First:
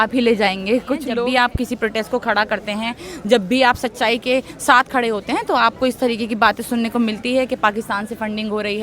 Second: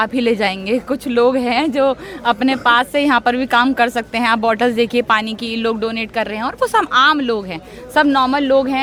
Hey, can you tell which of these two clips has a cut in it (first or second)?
first